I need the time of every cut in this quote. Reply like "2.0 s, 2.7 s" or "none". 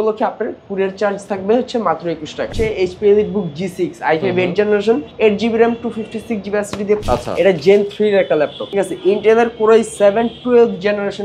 2.5 s, 7.0 s, 8.6 s